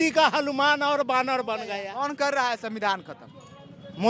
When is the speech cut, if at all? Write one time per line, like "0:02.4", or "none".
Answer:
0:01.8